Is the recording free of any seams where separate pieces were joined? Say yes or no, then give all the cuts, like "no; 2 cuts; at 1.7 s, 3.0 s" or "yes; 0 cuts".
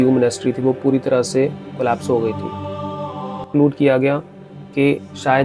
no; 1 cut; at 3.5 s